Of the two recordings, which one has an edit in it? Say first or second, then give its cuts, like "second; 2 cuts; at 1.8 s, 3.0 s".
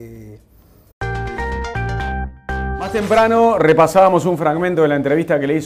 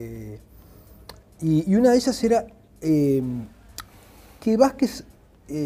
second; 1 cut; at 1.0 s